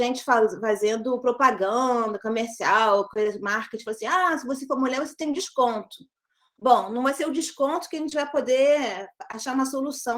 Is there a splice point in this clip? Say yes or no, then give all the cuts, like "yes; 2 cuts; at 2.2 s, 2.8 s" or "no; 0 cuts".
no; 0 cuts